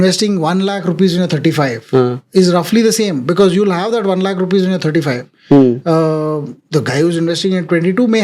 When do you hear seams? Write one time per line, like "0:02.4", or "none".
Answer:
none